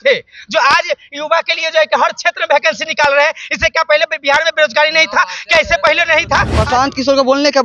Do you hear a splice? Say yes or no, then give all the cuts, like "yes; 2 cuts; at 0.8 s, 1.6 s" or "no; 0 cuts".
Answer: yes; 1 cut; at 6.5 s